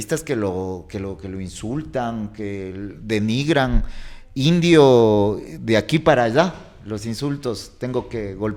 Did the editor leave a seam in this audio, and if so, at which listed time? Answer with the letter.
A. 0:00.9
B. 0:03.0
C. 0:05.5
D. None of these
D